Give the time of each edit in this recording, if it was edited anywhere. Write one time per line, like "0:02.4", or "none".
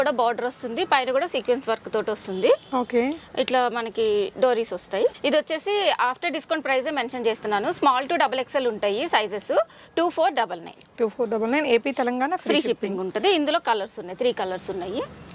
none